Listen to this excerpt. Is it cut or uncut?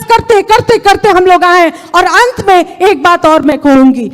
uncut